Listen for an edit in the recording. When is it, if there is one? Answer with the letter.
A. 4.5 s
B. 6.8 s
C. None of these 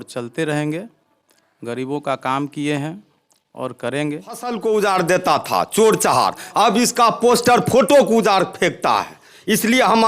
A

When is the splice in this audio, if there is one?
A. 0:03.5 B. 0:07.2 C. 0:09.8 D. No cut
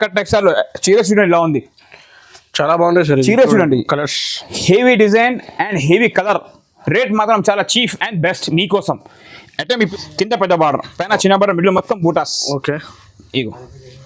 C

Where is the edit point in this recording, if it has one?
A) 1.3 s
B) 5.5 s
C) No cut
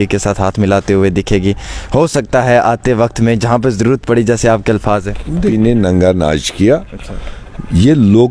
B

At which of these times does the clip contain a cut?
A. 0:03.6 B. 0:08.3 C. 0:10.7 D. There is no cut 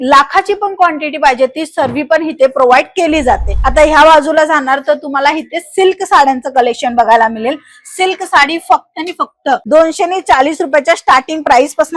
A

